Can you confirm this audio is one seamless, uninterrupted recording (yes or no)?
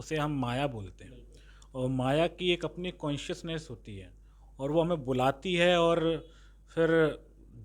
yes